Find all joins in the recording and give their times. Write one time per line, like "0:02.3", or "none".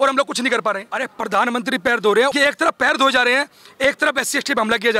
0:00.9
0:02.3